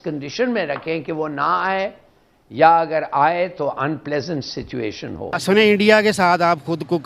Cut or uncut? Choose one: cut